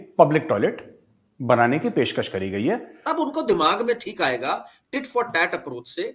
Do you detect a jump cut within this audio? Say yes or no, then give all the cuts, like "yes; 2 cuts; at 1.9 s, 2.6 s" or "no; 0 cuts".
yes; 1 cut; at 2.9 s